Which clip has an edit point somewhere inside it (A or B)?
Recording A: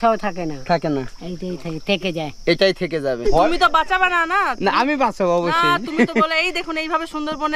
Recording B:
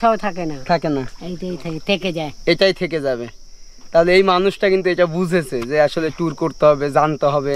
A